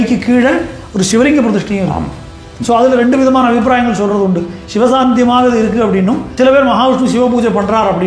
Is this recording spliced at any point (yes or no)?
yes